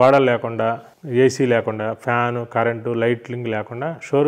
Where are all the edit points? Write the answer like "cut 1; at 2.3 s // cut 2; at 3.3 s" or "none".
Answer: cut 1; at 0.9 s

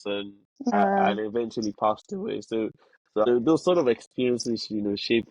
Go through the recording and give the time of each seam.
cut 1; at 0.7 s // cut 2; at 3.3 s

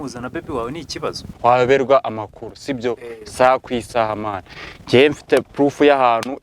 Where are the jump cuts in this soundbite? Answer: cut 1; at 1.3 s

